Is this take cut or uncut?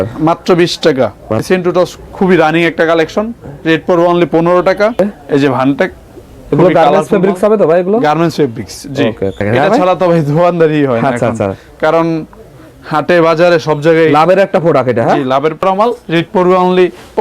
cut